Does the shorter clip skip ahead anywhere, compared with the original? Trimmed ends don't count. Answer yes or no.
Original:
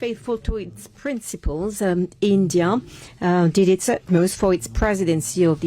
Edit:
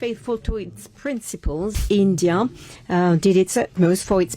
yes